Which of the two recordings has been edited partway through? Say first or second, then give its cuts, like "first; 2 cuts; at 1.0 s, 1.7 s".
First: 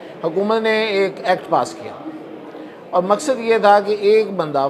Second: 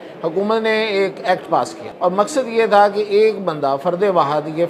second; 1 cut; at 1.8 s